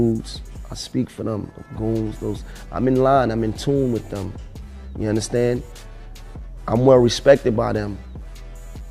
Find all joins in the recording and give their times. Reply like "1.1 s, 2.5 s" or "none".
none